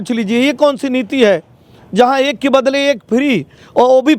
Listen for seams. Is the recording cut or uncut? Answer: uncut